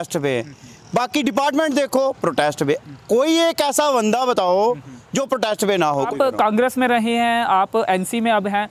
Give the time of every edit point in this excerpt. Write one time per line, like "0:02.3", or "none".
0:06.1